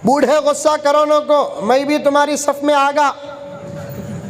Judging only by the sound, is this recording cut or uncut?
uncut